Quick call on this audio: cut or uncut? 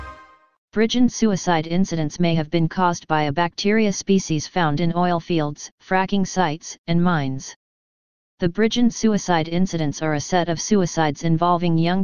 uncut